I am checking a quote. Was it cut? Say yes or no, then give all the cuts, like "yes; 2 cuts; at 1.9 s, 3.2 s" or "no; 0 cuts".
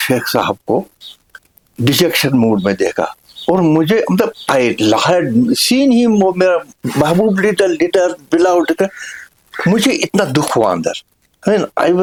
no; 0 cuts